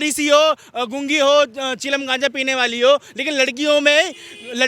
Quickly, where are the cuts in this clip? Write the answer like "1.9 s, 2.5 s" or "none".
none